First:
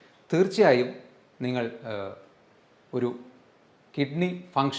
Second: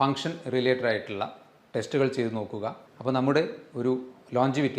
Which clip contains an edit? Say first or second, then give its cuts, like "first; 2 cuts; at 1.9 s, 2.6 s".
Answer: second; 1 cut; at 2.9 s